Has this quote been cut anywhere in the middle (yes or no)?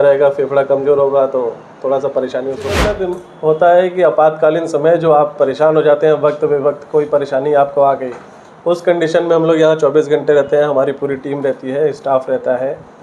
yes